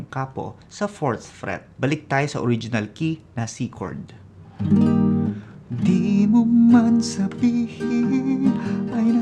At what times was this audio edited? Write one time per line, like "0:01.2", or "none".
0:01.7

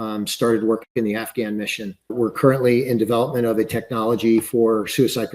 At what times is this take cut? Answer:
0:02.1

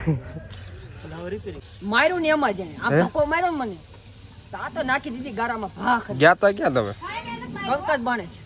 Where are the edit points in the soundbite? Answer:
0:01.7

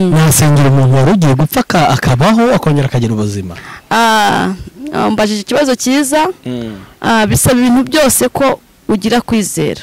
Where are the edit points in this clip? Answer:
none

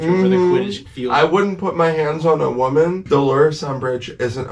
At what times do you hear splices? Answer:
0:03.0

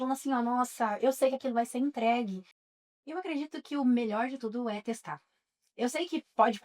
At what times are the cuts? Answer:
0:02.5

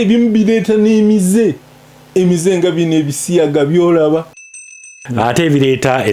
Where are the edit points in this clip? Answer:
0:04.7

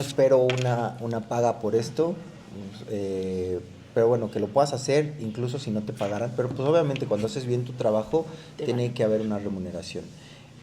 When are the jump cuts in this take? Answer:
none

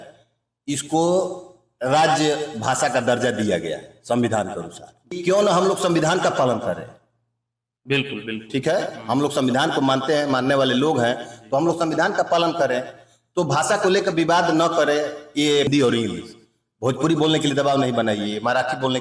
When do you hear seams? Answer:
0:05.2
0:15.7

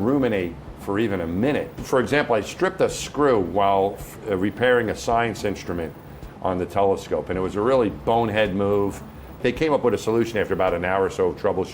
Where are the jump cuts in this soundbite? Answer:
0:01.8
0:09.4

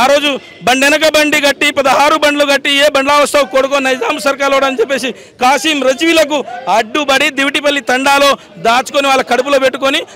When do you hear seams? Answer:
none

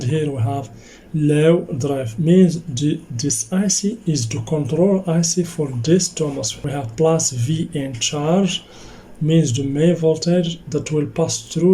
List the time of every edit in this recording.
0:06.5

